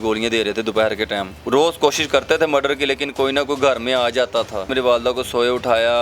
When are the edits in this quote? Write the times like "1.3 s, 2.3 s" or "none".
1.4 s, 4.7 s